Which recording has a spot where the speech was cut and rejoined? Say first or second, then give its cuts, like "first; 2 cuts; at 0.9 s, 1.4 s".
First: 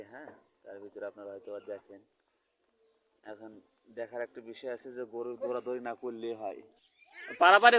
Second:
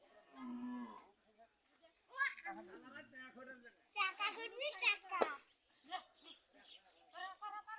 first; 1 cut; at 6.7 s